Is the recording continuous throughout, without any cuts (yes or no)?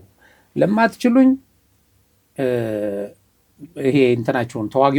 yes